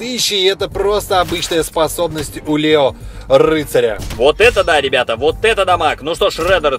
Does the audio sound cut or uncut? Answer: uncut